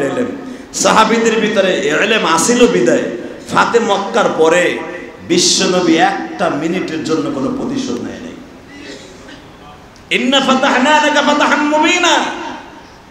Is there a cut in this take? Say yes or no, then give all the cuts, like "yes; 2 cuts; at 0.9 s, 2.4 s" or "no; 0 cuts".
no; 0 cuts